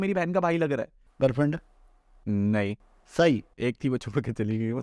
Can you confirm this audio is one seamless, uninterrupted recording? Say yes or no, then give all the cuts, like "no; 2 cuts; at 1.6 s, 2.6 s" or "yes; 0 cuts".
no; 1 cut; at 1.0 s